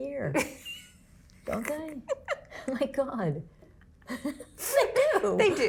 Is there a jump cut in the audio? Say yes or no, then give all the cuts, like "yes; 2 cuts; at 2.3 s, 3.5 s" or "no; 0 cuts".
no; 0 cuts